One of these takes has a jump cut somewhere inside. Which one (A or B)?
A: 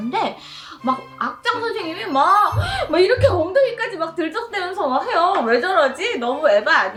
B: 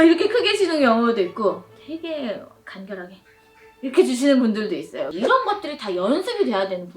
B